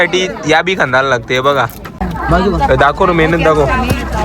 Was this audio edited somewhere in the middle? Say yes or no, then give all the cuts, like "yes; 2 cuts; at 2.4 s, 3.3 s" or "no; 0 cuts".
yes; 1 cut; at 2.1 s